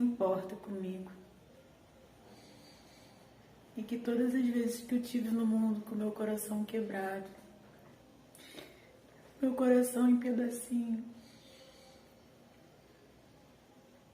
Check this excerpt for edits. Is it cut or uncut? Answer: cut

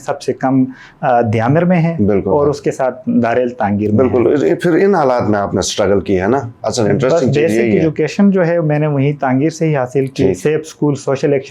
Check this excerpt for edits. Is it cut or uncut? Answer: uncut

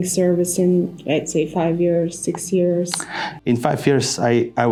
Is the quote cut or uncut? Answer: uncut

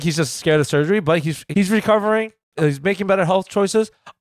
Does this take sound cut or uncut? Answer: cut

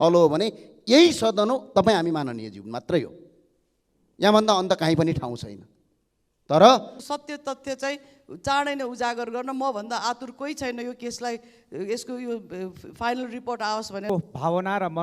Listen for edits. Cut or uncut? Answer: cut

